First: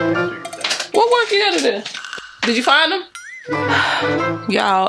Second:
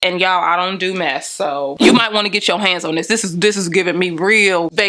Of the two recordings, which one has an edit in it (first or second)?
second